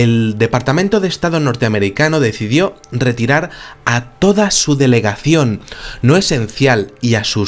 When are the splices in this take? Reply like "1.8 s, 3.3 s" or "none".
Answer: 5.2 s